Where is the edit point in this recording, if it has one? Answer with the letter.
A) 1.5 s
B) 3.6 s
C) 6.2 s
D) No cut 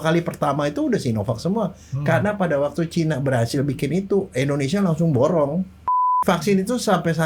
C